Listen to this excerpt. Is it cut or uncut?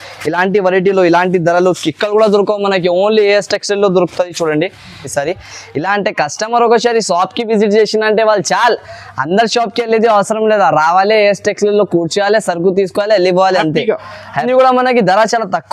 cut